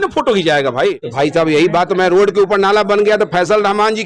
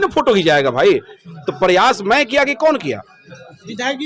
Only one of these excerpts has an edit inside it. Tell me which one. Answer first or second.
first